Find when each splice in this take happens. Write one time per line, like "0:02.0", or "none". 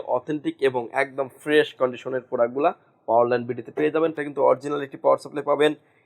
0:04.2